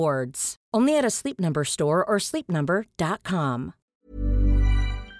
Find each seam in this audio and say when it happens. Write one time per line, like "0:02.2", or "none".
0:03.8